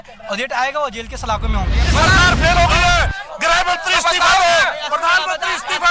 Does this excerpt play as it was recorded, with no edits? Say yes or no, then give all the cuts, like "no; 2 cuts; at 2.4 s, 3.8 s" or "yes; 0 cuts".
no; 1 cut; at 1.8 s